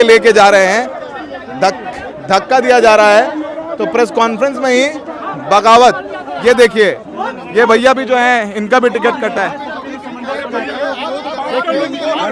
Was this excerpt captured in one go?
yes; 0 cuts

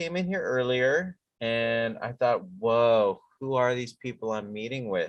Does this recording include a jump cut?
yes; 1 cut; at 1.2 s

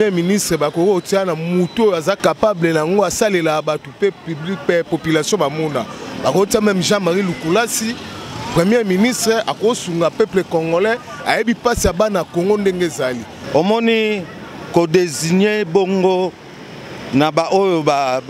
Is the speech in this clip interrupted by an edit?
yes; 2 cuts; at 2.2 s, 13.3 s

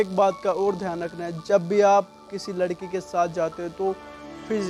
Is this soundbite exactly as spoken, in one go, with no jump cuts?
yes; 0 cuts

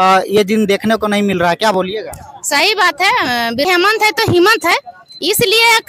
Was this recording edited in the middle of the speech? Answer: yes; 1 cut; at 3.7 s

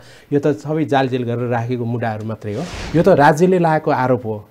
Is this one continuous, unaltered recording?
no; 1 cut; at 2.8 s

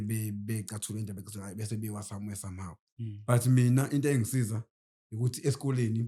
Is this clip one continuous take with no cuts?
yes; 0 cuts

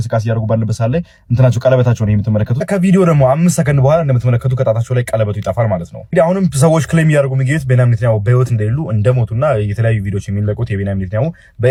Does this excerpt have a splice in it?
no; 0 cuts

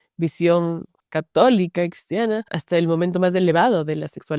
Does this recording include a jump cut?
yes; 2 cuts; at 0.9 s, 2.5 s

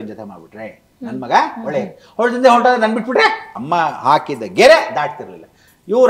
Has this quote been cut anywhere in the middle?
yes; 1 cut; at 3.5 s

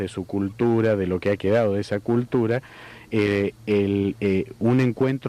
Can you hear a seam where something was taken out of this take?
no; 0 cuts

